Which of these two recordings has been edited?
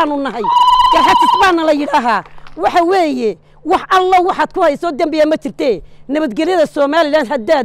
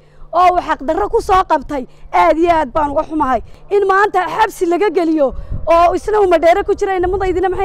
second; 1 cut; at 3.5 s

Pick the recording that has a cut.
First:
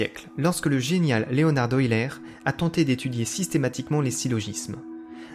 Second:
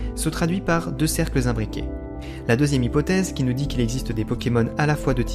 second; 1 cut; at 1.8 s

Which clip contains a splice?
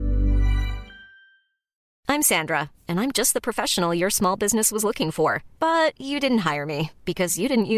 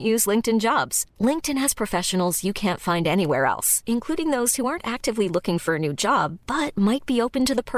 first; 1 cut; at 1.8 s

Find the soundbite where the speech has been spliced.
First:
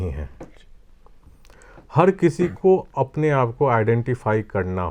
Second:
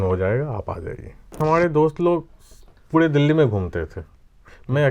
second; 1 cut; at 1.4 s

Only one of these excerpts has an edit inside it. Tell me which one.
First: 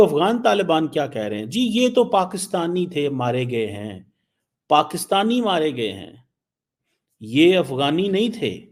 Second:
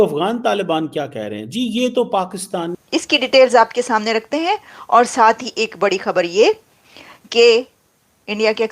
second; 1 cut; at 2.7 s

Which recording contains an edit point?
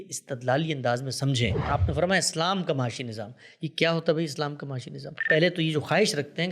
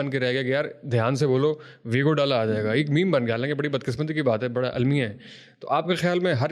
first; 2 cuts; at 1.6 s, 5.2 s

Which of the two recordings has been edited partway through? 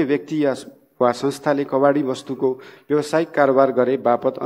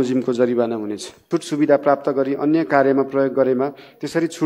second; 1 cut; at 1.1 s

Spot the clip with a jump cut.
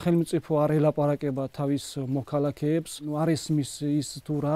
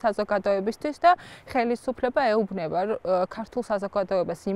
first; 1 cut; at 3.1 s

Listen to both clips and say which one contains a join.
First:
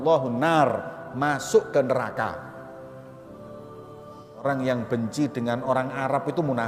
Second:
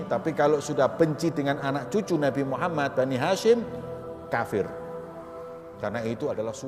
first; 2 cuts; at 2.3 s, 4.2 s

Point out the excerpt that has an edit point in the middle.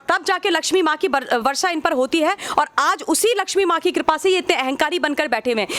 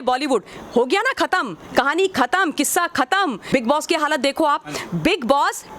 second; 1 cut; at 3.4 s

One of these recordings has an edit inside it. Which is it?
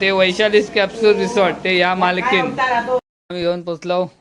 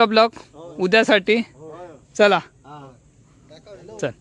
first; 1 cut; at 3.0 s

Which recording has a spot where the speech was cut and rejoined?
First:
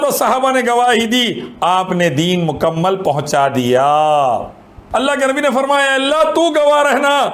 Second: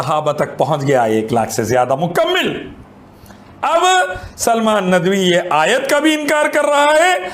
first; 1 cut; at 4.7 s

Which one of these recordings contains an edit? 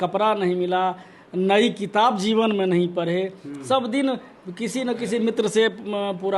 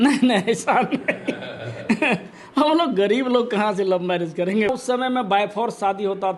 second; 1 cut; at 4.7 s

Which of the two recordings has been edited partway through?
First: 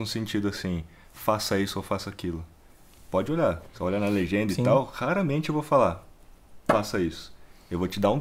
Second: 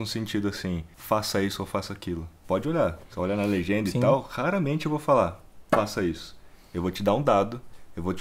second; 3 cuts; at 0.9 s, 2.3 s, 5.5 s

